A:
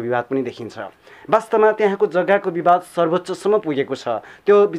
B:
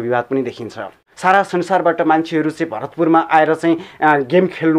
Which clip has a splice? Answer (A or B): B